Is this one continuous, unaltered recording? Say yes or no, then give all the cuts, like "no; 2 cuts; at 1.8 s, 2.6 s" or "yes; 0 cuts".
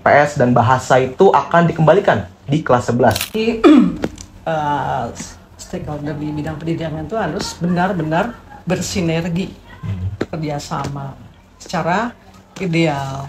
no; 1 cut; at 3.3 s